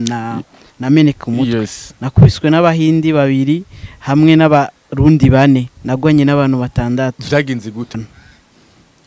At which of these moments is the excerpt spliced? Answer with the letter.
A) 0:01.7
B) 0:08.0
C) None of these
B